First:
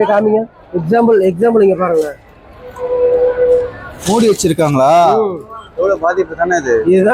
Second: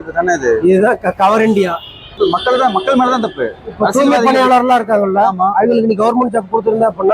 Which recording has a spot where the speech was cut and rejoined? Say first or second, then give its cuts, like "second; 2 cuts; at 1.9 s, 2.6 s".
second; 1 cut; at 2.0 s